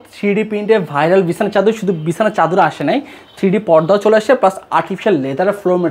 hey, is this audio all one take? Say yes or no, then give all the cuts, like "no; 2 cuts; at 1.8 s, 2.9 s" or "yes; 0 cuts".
yes; 0 cuts